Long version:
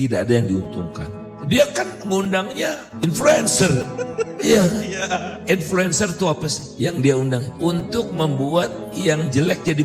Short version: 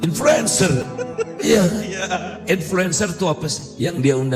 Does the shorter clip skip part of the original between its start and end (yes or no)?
no